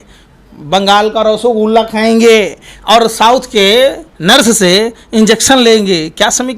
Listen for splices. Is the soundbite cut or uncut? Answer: cut